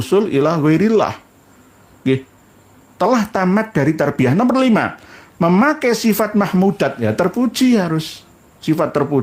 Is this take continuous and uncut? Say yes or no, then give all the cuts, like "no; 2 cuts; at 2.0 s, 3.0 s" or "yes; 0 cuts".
yes; 0 cuts